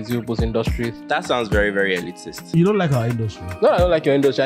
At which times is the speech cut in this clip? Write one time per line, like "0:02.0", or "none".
0:00.9
0:02.5